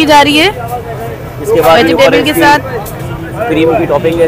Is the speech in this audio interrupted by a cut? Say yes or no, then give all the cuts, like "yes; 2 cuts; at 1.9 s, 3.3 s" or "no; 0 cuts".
no; 0 cuts